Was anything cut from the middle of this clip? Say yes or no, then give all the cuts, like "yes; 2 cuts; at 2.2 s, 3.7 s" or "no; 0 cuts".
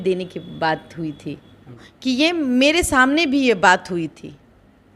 yes; 1 cut; at 1.8 s